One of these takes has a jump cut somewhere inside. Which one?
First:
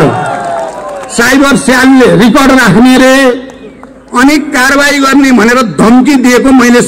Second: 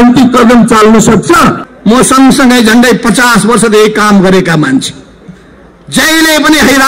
second; 1 cut; at 1.7 s

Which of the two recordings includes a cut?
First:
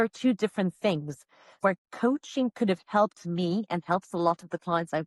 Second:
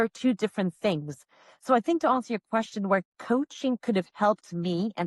first; 1 cut; at 1.5 s

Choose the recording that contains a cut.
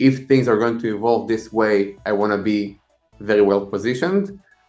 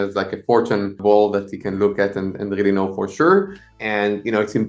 second; 2 cuts; at 1.0 s, 3.7 s

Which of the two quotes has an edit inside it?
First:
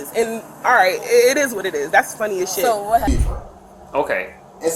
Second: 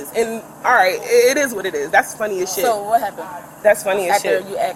first; 1 cut; at 3.1 s

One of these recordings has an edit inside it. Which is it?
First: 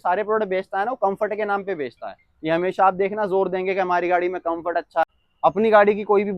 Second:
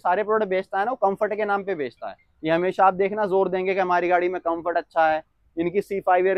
first; 1 cut; at 5.0 s

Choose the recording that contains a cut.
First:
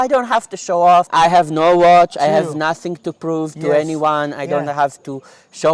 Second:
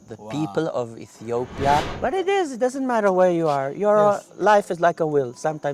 second; 1 cut; at 1.9 s

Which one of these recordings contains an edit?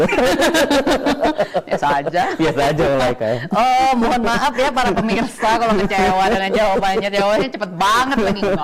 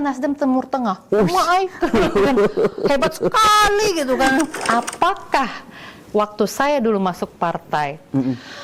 second; 1 cut; at 4.6 s

